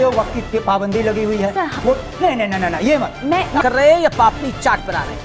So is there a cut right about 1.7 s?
no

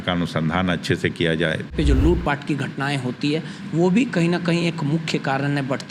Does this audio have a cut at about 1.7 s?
yes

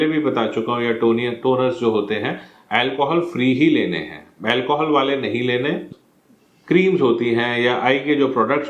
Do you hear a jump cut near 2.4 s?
no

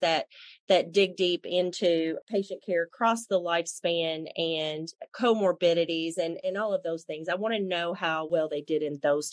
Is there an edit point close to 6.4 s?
yes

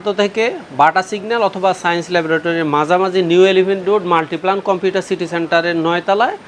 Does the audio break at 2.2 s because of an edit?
no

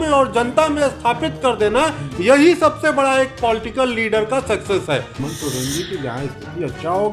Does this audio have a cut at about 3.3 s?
no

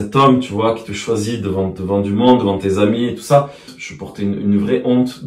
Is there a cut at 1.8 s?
yes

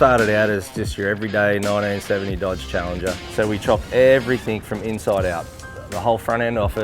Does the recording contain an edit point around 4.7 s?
no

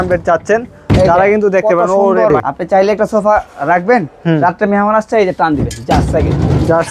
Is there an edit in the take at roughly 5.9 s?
no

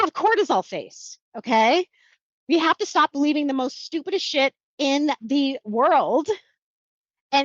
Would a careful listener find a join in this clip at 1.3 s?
no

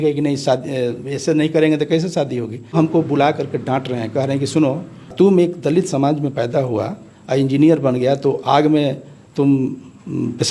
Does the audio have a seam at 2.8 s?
yes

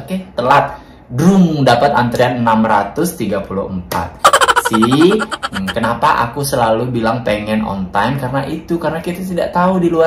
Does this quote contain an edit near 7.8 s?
no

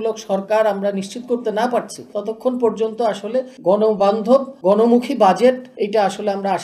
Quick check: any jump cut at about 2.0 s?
yes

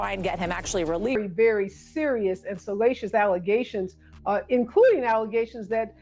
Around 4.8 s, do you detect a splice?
no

